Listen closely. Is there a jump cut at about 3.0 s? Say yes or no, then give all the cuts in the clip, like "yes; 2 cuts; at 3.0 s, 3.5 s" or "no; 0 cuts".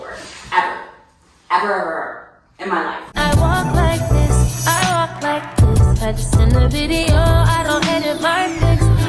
yes; 1 cut; at 3.0 s